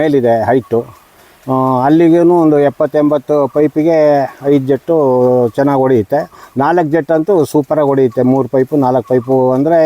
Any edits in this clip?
no; 0 cuts

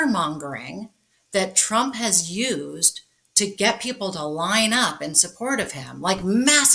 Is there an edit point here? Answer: no; 0 cuts

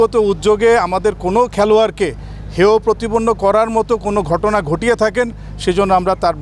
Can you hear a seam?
no; 0 cuts

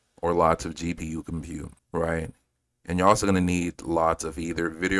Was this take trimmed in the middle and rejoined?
yes; 1 cut; at 1.8 s

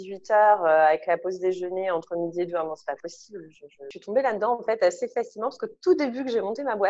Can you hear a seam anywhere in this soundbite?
yes; 1 cut; at 3.9 s

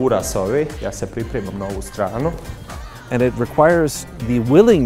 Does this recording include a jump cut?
yes; 1 cut; at 2.9 s

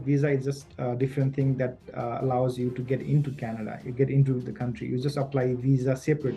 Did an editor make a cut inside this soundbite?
no; 0 cuts

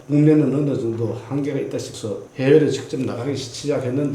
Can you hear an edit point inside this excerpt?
yes; 1 cut; at 2.3 s

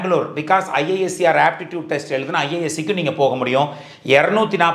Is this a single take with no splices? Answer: yes; 0 cuts

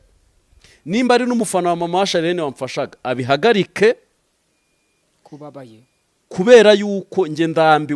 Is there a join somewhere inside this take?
no; 0 cuts

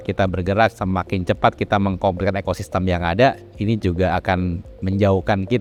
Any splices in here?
no; 0 cuts

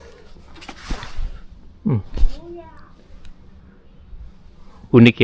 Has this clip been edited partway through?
no; 0 cuts

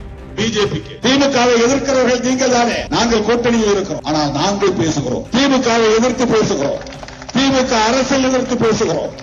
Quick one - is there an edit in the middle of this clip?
yes; 4 cuts; at 0.9 s, 2.8 s, 4.0 s, 5.2 s

